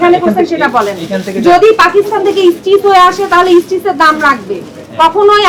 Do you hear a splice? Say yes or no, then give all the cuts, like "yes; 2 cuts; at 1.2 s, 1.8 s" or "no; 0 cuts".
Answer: no; 0 cuts